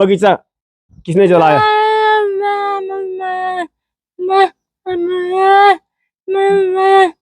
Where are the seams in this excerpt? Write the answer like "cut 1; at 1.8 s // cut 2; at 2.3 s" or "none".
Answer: none